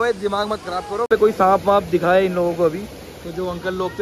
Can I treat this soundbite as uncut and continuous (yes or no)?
no